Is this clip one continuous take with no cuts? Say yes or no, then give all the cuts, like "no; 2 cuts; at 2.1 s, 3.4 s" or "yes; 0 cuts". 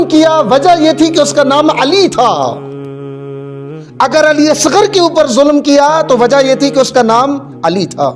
yes; 0 cuts